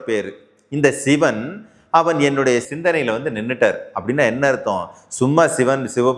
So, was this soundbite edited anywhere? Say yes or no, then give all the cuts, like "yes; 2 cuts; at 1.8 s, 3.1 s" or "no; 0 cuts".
yes; 1 cut; at 2.7 s